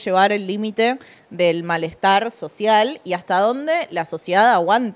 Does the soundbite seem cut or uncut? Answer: uncut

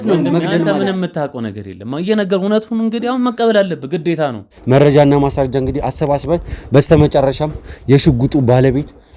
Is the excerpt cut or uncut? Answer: cut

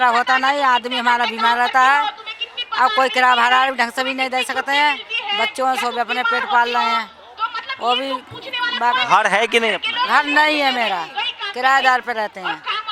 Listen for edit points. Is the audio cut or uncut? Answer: uncut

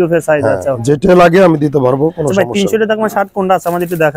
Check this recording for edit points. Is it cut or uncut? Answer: uncut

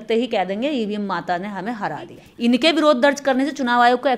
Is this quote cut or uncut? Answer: cut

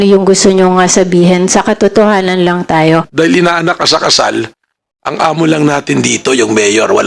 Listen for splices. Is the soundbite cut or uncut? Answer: cut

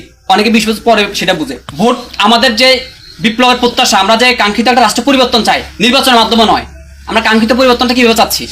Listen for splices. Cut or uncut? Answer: cut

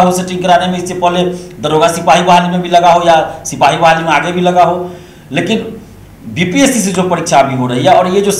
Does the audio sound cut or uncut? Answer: uncut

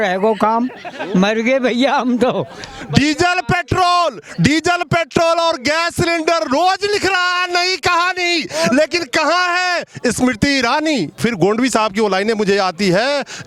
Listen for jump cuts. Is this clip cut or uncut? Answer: cut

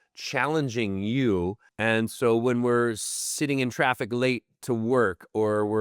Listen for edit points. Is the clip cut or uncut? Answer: cut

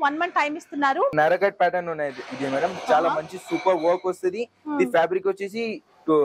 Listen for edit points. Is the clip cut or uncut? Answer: cut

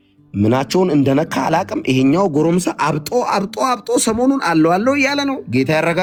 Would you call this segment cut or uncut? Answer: uncut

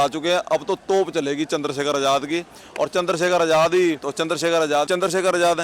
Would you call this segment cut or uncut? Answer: uncut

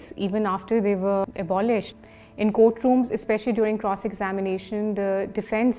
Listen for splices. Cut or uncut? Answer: cut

